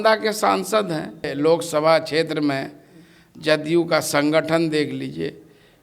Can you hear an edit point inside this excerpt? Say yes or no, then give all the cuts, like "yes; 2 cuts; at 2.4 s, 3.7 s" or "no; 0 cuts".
yes; 1 cut; at 1.3 s